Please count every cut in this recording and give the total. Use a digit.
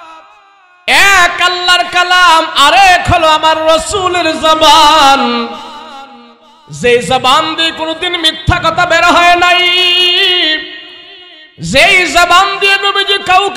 0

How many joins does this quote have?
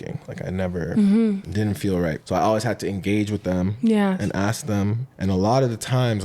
2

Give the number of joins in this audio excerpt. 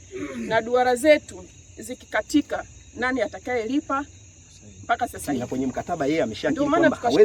1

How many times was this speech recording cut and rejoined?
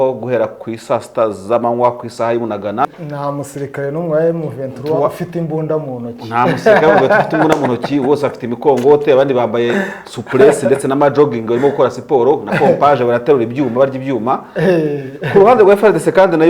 1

